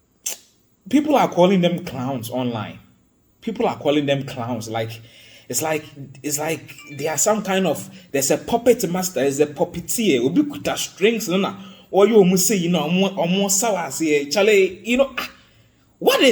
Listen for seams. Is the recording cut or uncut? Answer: uncut